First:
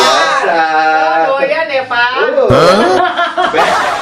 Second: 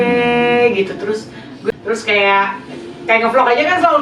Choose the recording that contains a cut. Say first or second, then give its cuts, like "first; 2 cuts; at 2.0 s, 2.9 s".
second; 1 cut; at 1.5 s